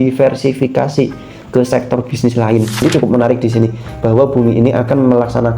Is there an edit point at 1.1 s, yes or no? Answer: no